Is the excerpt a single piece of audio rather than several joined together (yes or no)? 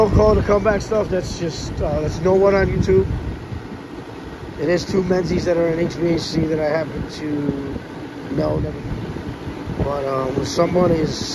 yes